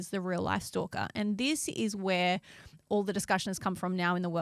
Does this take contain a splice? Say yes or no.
no